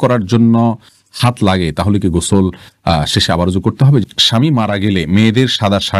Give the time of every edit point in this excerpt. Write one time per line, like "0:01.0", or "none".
0:04.0